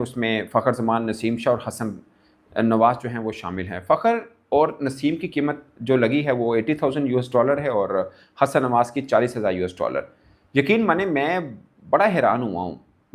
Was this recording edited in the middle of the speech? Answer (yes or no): no